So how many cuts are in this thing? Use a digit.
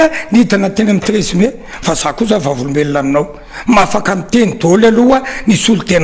0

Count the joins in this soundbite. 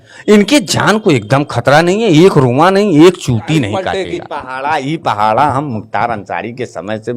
1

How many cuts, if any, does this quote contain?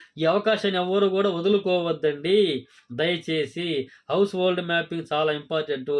0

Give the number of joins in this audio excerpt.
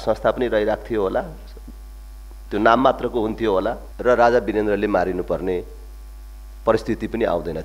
1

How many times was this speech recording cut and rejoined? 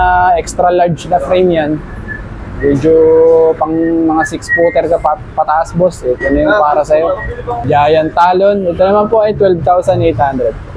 0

